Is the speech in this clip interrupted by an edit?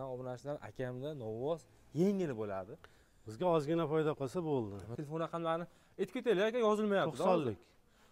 yes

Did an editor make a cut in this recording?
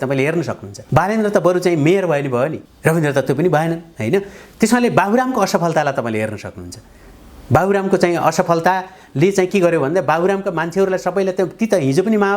no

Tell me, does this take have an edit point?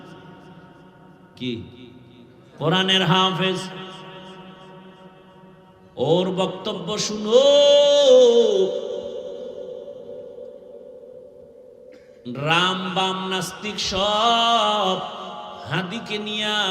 no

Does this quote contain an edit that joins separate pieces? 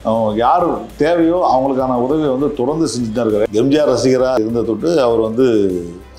yes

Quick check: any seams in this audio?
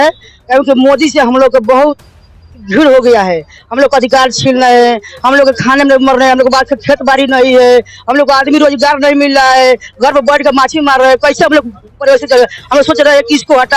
no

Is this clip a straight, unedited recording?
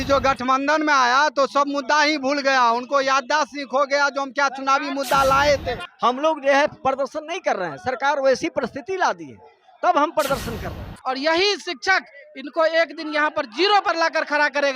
no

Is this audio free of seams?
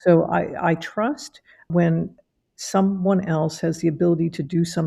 no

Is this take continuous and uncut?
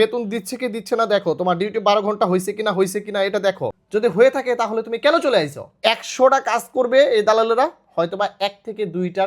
no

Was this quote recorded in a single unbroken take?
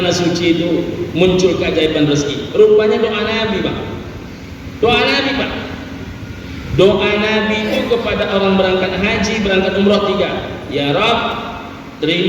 yes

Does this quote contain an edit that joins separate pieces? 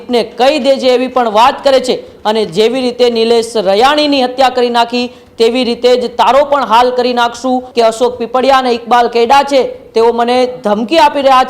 yes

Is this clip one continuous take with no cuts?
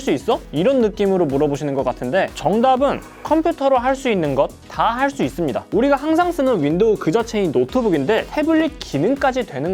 no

